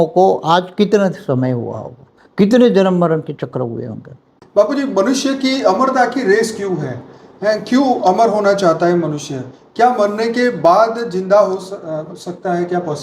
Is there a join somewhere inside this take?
yes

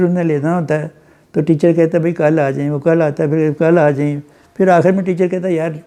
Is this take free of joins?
yes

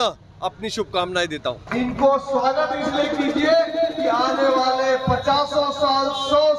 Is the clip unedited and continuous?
no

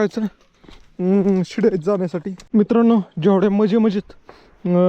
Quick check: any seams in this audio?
yes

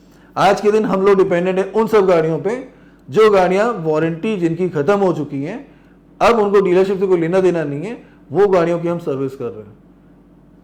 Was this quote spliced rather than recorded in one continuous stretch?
no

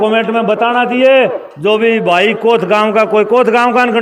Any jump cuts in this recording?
no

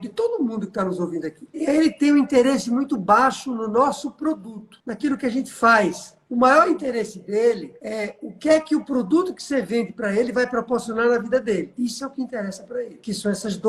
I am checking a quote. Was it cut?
no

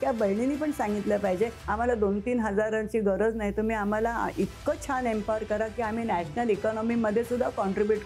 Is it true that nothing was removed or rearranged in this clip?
no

